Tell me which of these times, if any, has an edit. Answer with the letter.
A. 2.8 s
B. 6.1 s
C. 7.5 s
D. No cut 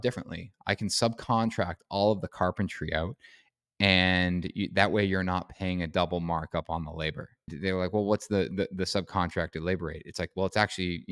C